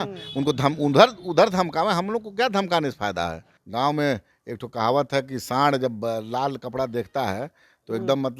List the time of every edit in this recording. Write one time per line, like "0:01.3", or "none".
0:03.5